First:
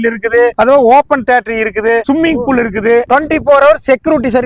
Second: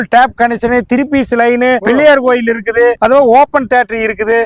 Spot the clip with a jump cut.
first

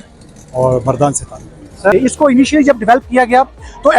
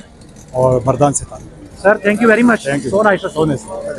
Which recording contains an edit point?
first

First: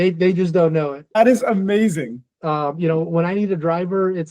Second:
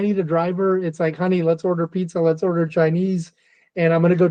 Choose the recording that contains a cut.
first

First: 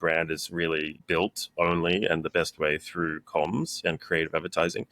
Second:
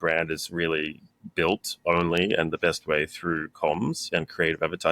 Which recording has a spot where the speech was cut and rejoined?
first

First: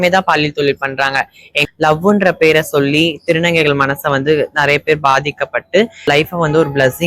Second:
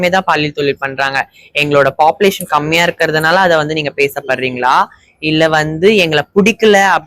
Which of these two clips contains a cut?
first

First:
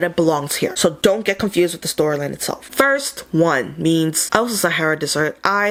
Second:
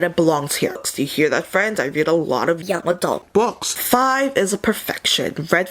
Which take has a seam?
second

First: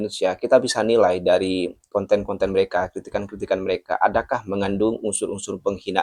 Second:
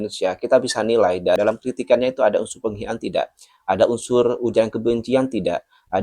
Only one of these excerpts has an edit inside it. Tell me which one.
second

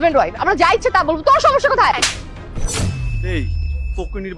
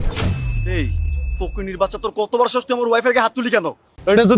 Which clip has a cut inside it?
second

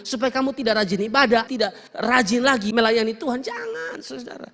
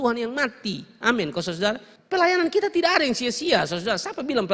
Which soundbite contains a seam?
second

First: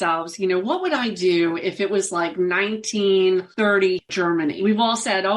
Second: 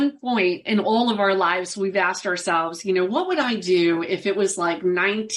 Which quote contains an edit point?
first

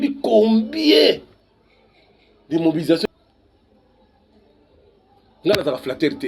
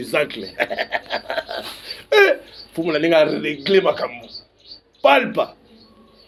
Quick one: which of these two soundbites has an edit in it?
first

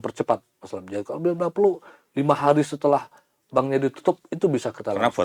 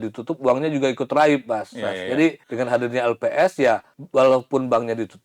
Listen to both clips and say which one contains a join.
second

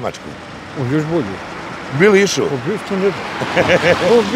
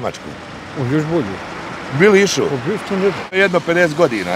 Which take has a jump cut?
second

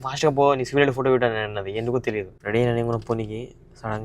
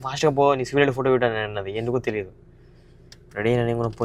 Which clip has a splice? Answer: first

